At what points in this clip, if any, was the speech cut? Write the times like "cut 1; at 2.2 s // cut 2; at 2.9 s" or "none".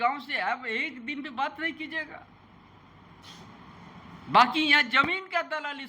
cut 1; at 3.2 s